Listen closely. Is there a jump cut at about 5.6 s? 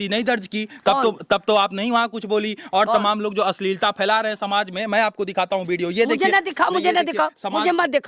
no; 0 cuts

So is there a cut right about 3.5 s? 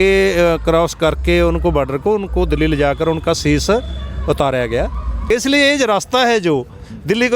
no; 1 cut; at 5.3 s

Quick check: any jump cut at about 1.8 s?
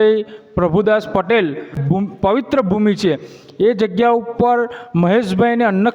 yes; 1 cut; at 1.8 s

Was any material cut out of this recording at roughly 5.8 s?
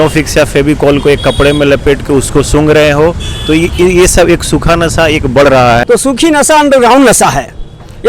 yes; 1 cut; at 5.8 s

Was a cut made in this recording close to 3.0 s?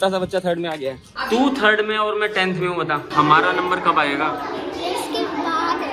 yes; 2 cuts; at 1.1 s, 3.0 s

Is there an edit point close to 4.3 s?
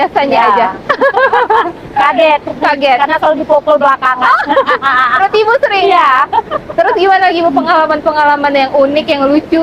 no; 0 cuts

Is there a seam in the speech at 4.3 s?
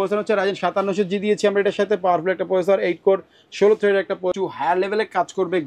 yes; 1 cut; at 4.3 s

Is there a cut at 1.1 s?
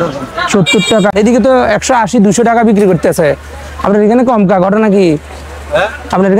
yes; 1 cut; at 1.1 s

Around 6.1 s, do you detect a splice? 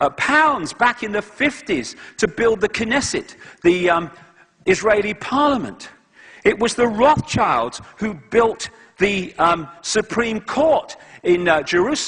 no; 1 cut; at 2.1 s

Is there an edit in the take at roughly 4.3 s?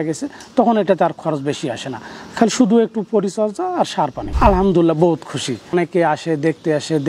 yes; 2 cuts; at 4.3 s, 5.7 s

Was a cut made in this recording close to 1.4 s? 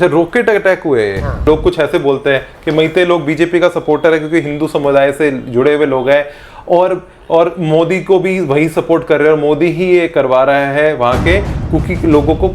yes; 1 cut; at 1.4 s

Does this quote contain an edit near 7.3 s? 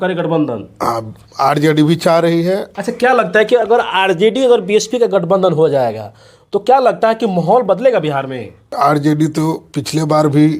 no; 2 cuts; at 2.7 s, 8.7 s

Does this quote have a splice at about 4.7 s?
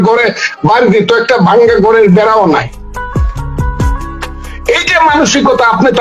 yes; 2 cuts; at 3.3 s, 4.7 s

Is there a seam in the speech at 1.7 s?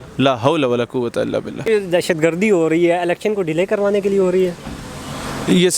yes; 1 cut; at 1.7 s

